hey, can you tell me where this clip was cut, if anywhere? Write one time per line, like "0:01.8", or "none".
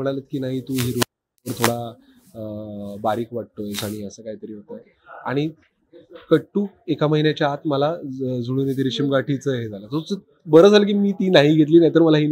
none